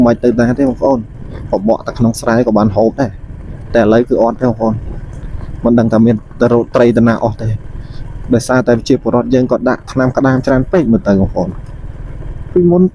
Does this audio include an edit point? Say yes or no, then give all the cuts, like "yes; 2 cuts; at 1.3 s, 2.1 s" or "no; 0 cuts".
no; 0 cuts